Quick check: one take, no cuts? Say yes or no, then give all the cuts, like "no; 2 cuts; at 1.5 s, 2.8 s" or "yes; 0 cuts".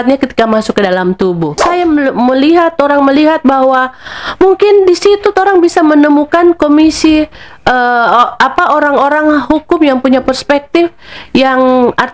no; 1 cut; at 1.6 s